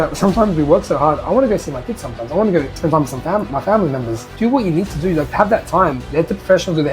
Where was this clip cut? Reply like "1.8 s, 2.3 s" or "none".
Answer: 4.2 s, 5.3 s